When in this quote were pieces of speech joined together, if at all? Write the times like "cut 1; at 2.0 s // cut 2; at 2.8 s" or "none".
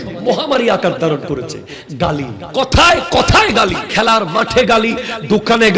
cut 1; at 2.4 s // cut 2; at 3.8 s